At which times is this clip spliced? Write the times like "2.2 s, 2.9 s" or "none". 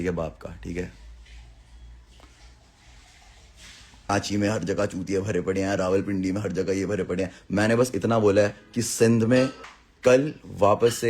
4.1 s, 9.7 s